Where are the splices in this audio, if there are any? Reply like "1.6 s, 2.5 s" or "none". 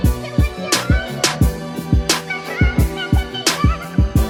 none